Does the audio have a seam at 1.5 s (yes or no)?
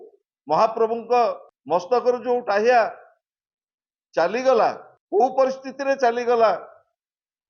yes